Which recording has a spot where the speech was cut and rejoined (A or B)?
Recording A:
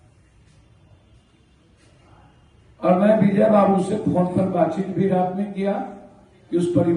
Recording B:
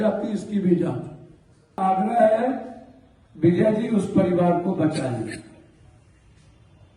B